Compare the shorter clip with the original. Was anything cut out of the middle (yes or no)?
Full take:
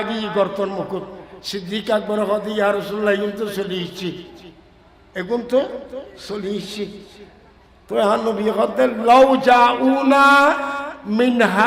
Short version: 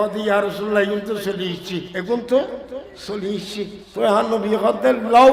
yes